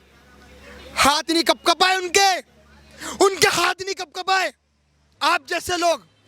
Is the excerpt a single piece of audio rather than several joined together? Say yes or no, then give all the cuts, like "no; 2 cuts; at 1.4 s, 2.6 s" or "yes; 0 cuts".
no; 1 cut; at 5.1 s